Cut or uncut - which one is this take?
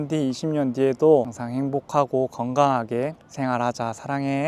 uncut